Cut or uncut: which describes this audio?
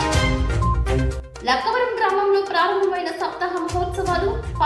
cut